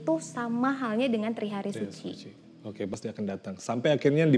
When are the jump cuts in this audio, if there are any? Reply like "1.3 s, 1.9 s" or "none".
3.0 s